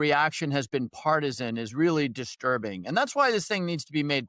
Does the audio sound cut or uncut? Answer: uncut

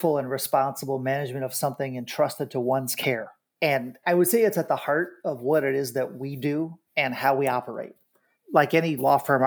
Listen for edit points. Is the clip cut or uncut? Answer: uncut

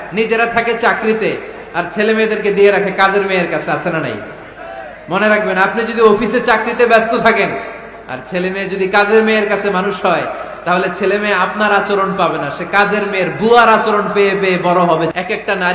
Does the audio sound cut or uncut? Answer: uncut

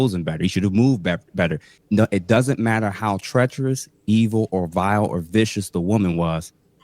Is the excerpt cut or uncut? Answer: cut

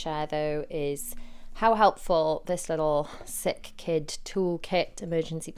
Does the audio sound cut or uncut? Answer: uncut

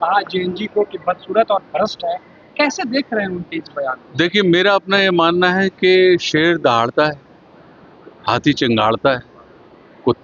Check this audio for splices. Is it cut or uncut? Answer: uncut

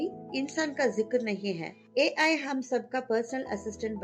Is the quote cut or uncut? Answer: uncut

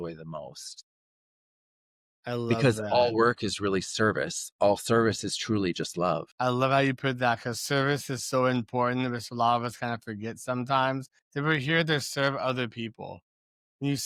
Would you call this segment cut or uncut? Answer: uncut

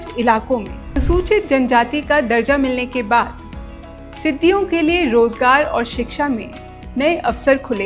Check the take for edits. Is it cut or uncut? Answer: cut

